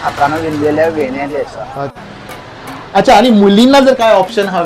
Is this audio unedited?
no; 1 cut; at 2.0 s

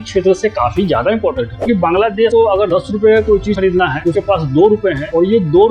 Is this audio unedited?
no; 1 cut; at 1.7 s

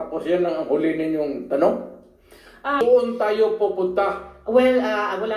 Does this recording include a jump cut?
yes; 1 cut; at 2.8 s

